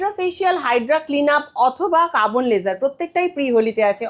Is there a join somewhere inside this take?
no; 0 cuts

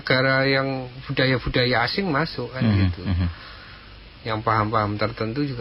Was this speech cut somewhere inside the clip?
no; 0 cuts

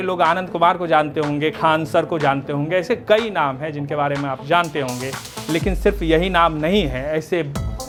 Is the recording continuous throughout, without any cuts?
yes; 0 cuts

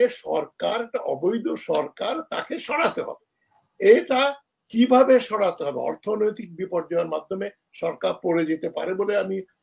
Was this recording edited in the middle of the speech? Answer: no; 0 cuts

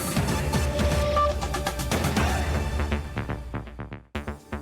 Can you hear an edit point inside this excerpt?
yes; 1 cut; at 3.6 s

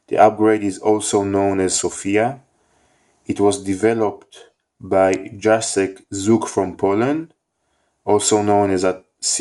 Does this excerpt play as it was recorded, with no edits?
no; 1 cut; at 2.8 s

